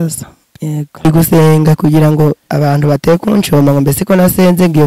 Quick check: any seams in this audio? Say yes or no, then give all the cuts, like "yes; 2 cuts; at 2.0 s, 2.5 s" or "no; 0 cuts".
yes; 1 cut; at 1.1 s